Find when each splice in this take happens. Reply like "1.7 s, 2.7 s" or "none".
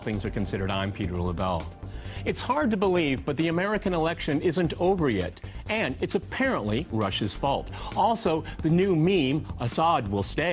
none